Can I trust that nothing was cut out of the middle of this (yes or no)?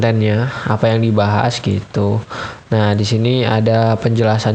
yes